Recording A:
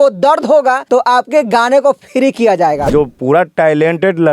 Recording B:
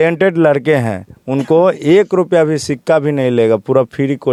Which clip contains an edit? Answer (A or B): A